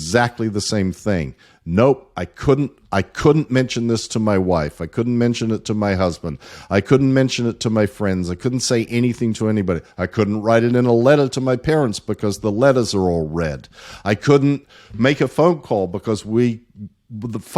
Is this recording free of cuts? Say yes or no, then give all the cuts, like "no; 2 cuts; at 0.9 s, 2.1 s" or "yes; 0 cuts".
yes; 0 cuts